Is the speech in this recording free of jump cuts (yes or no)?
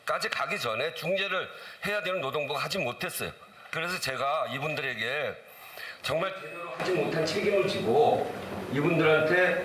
no